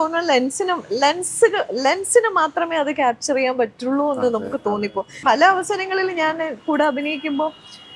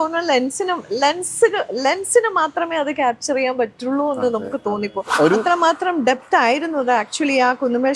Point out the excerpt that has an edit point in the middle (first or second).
second